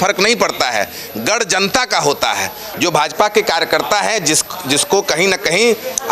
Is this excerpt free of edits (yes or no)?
no